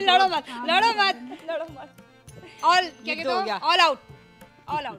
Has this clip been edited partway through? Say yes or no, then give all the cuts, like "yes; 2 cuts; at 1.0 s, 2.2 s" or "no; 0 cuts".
no; 0 cuts